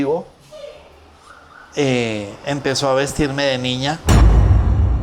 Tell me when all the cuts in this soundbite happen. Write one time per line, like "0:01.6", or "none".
0:04.0